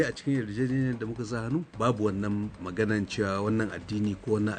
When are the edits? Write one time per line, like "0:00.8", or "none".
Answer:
none